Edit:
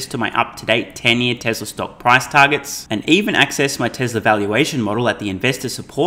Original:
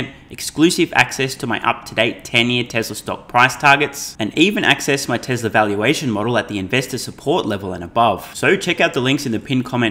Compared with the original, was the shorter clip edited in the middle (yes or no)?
no